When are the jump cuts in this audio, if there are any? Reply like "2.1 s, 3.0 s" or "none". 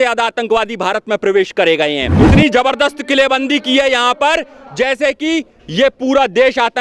2.1 s